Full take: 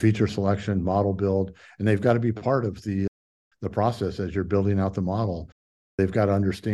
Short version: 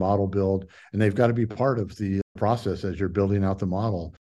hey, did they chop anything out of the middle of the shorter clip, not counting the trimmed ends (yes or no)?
yes